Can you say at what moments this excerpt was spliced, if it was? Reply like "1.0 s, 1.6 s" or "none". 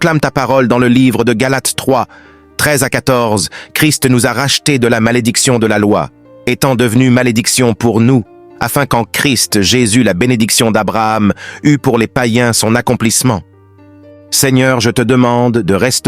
13.8 s